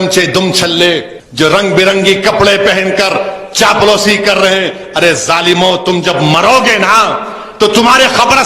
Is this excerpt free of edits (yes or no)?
no